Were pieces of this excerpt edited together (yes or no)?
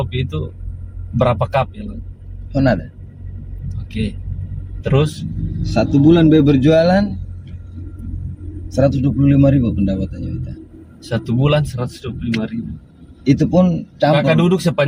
no